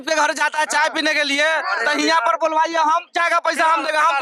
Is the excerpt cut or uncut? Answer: uncut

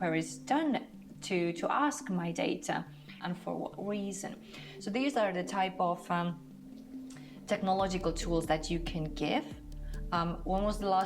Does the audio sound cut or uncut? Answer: cut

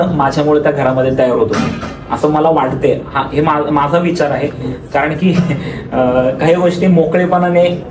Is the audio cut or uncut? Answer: uncut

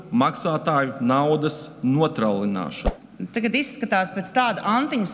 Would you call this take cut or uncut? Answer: cut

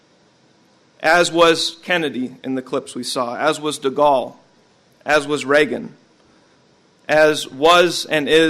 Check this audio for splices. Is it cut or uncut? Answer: cut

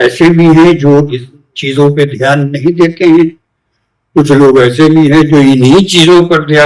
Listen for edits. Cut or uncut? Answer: uncut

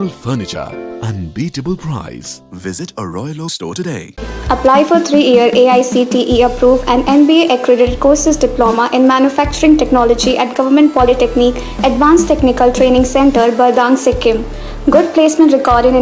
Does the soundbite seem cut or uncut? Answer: uncut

